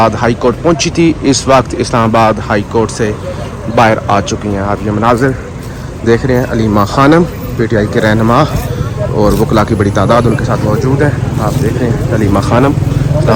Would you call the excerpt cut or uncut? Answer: uncut